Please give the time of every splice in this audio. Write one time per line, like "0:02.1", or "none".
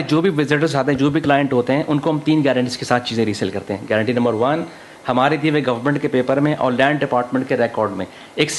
none